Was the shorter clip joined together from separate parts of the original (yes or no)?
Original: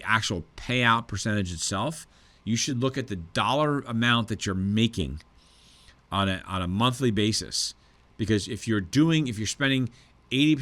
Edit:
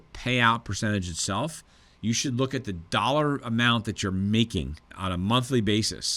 yes